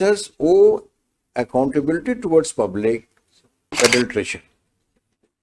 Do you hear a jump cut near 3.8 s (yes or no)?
yes